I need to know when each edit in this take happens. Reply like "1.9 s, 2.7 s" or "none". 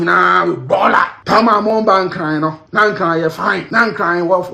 1.2 s, 2.6 s, 3.7 s